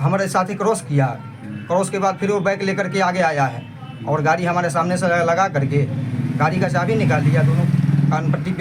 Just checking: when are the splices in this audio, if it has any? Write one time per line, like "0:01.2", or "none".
none